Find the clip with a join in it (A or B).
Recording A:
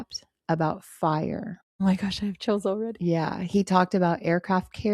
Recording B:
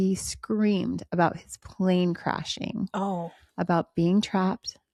A